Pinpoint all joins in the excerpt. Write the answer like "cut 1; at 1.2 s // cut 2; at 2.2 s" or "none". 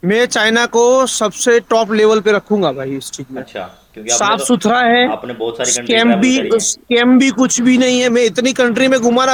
none